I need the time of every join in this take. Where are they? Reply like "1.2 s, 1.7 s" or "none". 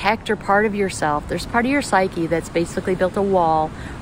none

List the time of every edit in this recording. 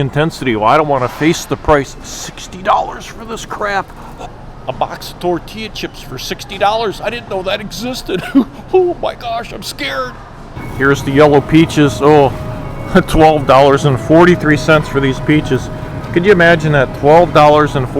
4.1 s, 10.6 s

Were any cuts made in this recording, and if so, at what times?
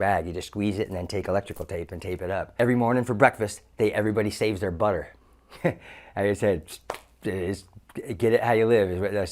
2.5 s

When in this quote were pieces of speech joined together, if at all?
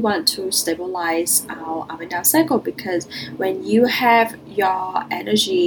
none

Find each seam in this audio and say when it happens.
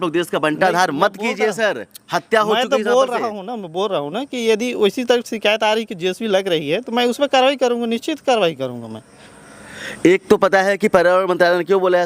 none

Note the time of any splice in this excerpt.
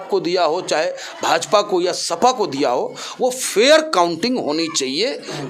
none

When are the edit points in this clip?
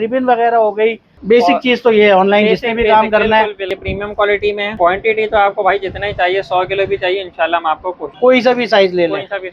1.1 s, 3.6 s, 4.7 s, 8.1 s

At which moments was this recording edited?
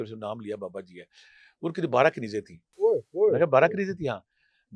2.6 s

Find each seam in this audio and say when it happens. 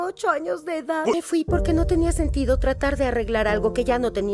1.1 s

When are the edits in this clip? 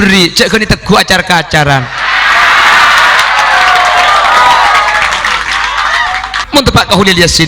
6.4 s

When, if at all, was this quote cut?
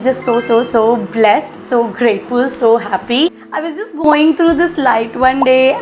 3.4 s

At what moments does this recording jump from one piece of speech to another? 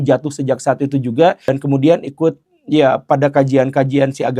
1.5 s

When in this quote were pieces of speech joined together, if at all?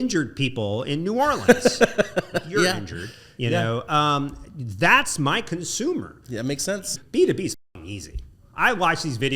7.0 s

